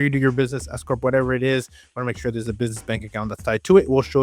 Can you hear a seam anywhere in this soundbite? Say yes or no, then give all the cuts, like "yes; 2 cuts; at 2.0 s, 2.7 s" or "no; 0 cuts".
no; 0 cuts